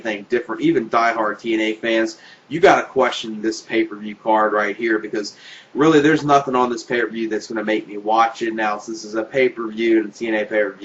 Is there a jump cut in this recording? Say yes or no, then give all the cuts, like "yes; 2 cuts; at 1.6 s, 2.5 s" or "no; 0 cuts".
yes; 1 cut; at 9.7 s